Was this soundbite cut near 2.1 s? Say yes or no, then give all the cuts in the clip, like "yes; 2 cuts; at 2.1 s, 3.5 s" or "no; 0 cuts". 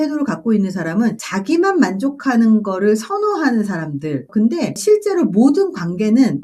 no; 1 cut; at 4.2 s